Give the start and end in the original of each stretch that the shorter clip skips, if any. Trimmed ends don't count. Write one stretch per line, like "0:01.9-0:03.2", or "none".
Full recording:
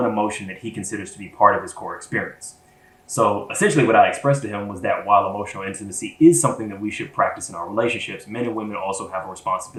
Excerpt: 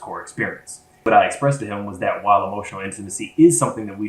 0:02.8-0:03.9